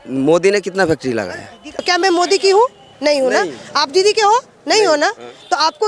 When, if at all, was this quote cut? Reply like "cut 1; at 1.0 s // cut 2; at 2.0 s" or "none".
cut 1; at 1.7 s